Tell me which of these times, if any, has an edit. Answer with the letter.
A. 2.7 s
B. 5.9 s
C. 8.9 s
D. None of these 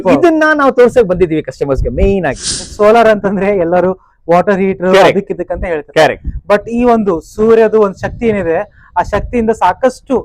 A